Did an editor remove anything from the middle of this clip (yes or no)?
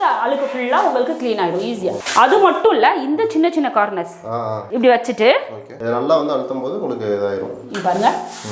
no